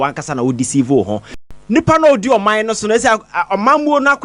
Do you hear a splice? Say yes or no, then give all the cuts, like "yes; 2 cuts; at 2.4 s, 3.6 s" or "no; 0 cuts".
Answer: yes; 1 cut; at 1.4 s